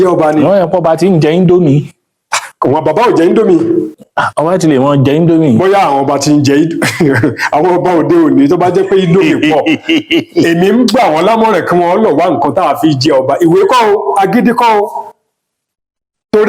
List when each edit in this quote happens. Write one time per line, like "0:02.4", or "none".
none